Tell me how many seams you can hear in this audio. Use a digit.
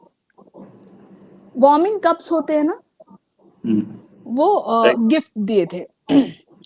0